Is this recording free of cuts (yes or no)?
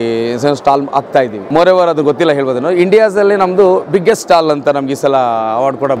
no